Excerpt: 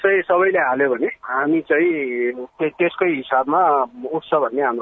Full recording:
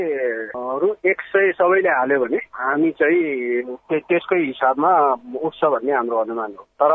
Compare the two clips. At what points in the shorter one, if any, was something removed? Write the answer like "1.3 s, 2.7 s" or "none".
none